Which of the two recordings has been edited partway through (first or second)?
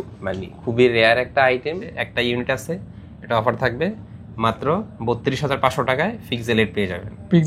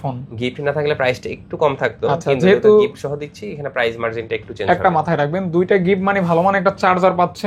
first